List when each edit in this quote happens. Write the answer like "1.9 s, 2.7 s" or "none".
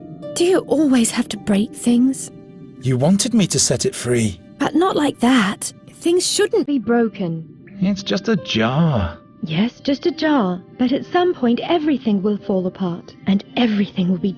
none